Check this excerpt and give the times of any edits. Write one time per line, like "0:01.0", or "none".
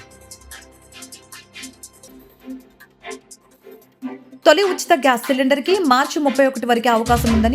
0:01.7